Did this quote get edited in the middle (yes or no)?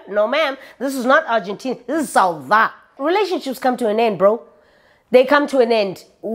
yes